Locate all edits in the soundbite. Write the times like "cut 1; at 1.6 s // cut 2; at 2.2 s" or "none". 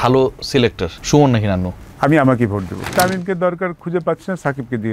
cut 1; at 0.9 s // cut 2; at 1.8 s // cut 3; at 2.9 s